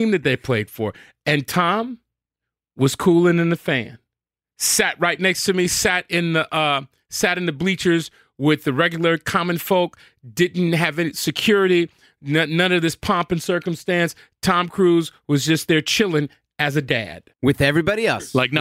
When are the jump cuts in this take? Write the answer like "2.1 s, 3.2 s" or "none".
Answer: 17.3 s